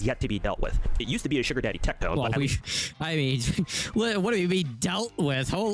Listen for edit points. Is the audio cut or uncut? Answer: uncut